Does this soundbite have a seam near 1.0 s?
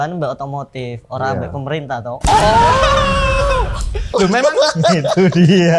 no; 0 cuts

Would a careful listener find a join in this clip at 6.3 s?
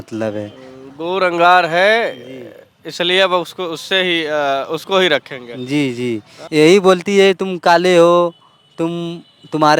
yes; 1 cut; at 6.3 s

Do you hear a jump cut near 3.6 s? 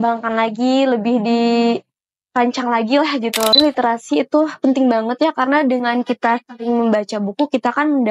yes; 1 cut; at 3.6 s

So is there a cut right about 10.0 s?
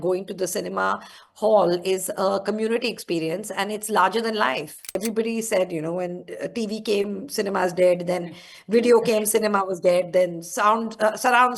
no; 1 cut; at 5.0 s

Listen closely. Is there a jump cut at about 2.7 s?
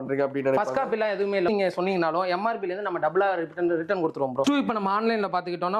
no; 2 cuts; at 1.5 s, 4.4 s

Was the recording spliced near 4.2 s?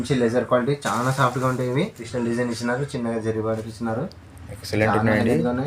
no; 1 cut; at 2.1 s

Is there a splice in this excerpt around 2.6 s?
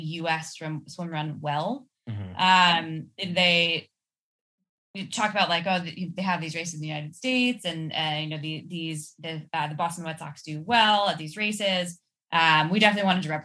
no; 1 cut; at 12.1 s

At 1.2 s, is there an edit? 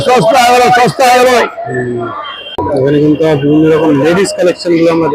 no; 1 cut; at 2.6 s

